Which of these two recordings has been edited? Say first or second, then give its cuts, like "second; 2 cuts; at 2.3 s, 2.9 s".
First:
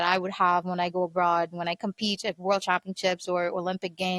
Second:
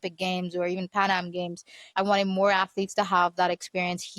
second; 1 cut; at 1.8 s